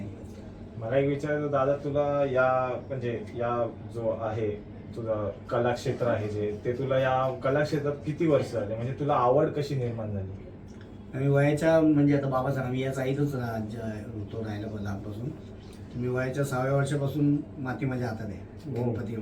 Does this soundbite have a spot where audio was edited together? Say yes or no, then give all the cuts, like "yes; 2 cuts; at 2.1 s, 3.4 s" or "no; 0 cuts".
no; 0 cuts